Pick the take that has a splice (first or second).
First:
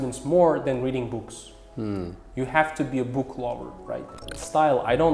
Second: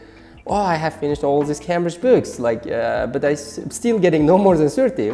first